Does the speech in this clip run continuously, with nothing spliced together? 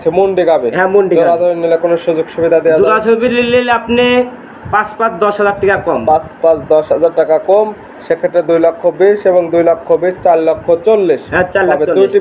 yes; 0 cuts

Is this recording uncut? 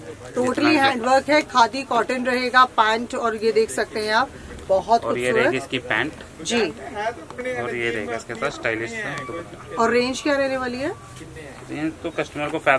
yes; 0 cuts

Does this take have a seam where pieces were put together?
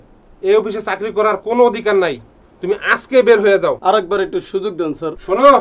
yes; 1 cut; at 3.8 s

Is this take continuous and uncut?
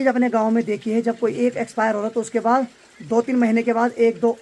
yes; 0 cuts

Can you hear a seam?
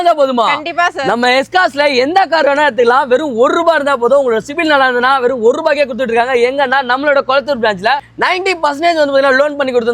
no; 0 cuts

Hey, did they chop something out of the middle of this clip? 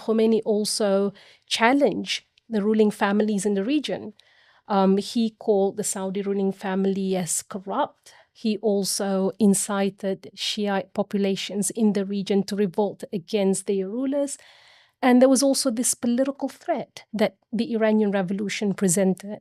no; 0 cuts

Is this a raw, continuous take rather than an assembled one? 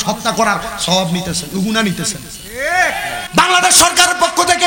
no; 1 cut; at 3.2 s

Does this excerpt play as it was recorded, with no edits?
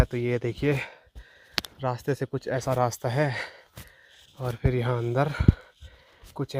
yes; 0 cuts

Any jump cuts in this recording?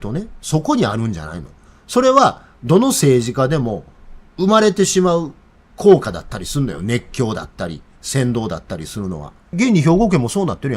yes; 1 cut; at 9.5 s

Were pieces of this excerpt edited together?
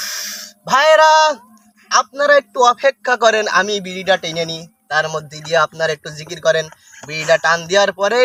no; 0 cuts

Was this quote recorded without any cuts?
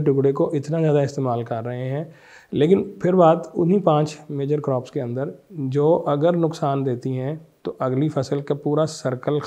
yes; 0 cuts

